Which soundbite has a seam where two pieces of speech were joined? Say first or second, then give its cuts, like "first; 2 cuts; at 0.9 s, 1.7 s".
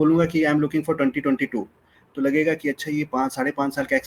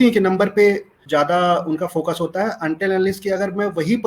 second; 1 cut; at 1.0 s